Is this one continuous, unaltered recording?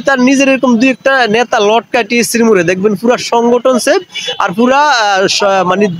yes; 0 cuts

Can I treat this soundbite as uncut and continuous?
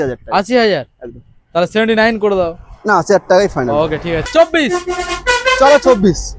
no; 1 cut; at 4.2 s

